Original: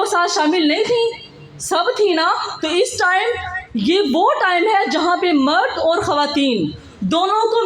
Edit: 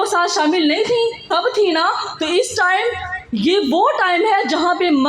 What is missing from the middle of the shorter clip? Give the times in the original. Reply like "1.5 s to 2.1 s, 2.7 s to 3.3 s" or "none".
1.2 s to 1.6 s